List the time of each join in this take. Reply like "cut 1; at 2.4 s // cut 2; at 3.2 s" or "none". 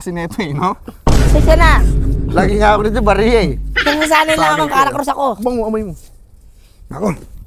none